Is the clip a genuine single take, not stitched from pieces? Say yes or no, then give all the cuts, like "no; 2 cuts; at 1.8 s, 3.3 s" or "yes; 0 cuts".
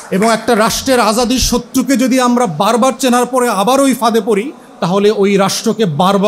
yes; 0 cuts